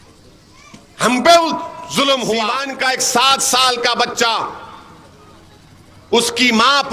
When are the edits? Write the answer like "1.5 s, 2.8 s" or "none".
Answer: 2.7 s